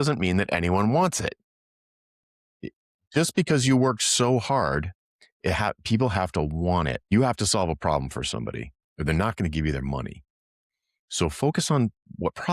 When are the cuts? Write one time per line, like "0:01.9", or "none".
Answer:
0:07.0

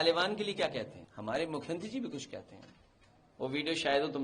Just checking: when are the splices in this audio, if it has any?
0:01.0

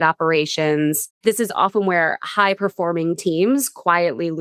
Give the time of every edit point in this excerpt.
0:01.1

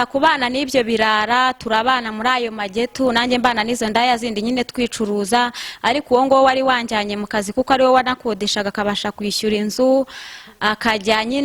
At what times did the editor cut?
none

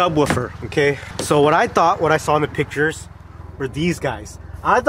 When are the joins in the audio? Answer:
0:01.1

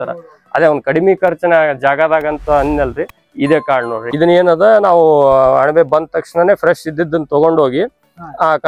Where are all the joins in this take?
0:04.1

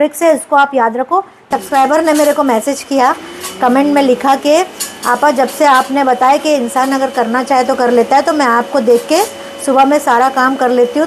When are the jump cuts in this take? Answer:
0:01.5

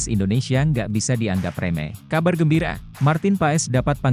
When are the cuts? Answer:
0:02.0
0:02.8

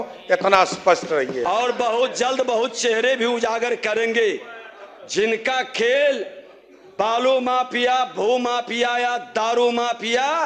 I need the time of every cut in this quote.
0:01.4

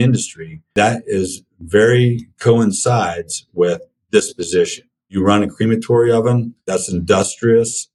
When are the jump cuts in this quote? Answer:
0:05.0
0:06.5

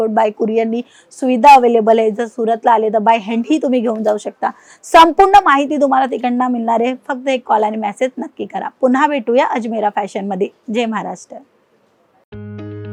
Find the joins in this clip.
none

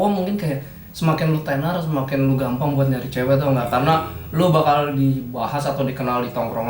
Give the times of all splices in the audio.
none

